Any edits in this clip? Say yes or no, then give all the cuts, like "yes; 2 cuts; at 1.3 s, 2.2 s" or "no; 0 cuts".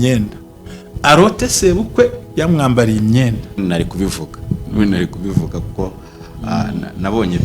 yes; 1 cut; at 3.5 s